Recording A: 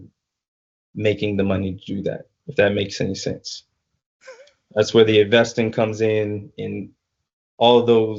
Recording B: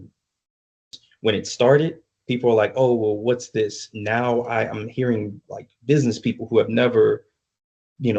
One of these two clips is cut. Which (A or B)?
B